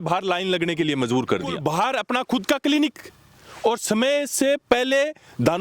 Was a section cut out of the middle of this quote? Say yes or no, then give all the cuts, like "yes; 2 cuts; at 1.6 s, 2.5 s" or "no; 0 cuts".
yes; 1 cut; at 1.6 s